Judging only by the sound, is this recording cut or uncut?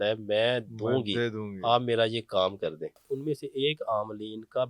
cut